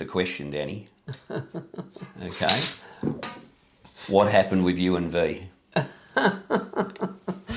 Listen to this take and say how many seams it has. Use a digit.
0